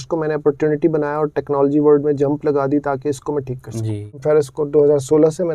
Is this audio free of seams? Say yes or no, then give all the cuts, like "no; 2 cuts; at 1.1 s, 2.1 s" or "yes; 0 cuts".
no; 1 cut; at 4.2 s